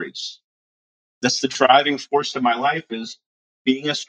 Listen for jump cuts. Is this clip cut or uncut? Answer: cut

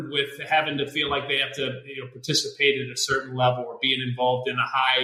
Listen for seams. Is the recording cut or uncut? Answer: uncut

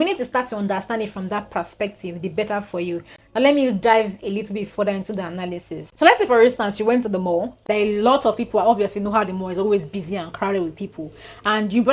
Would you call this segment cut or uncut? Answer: uncut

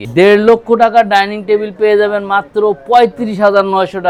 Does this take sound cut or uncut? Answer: uncut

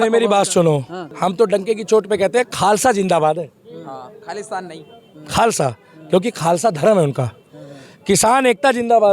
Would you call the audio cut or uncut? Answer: cut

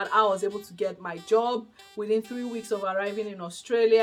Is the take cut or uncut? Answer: uncut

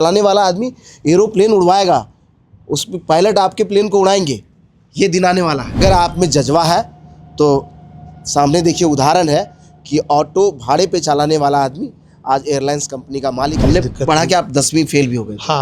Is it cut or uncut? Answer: cut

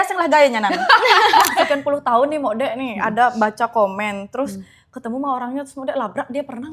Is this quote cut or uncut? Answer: cut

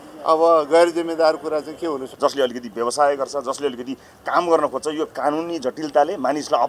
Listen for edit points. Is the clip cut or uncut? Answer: cut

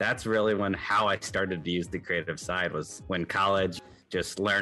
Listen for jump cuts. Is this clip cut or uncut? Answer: cut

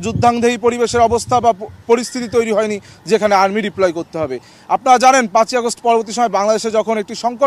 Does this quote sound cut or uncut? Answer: uncut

